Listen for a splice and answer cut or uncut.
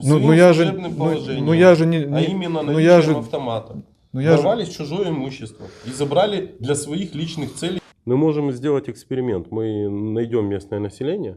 cut